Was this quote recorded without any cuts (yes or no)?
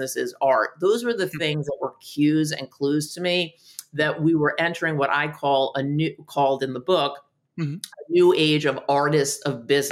yes